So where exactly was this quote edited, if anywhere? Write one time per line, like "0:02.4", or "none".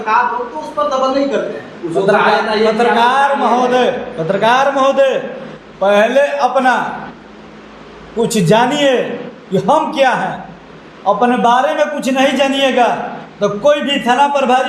none